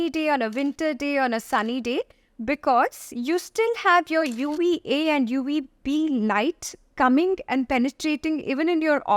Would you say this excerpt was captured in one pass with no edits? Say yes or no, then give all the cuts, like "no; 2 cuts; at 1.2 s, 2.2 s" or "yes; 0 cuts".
yes; 0 cuts